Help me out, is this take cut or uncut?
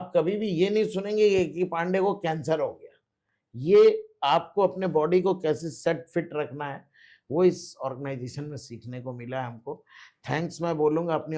uncut